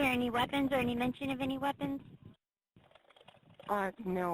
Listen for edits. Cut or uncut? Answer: cut